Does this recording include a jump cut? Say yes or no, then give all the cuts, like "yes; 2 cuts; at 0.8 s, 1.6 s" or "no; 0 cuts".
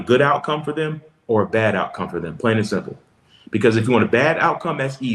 no; 0 cuts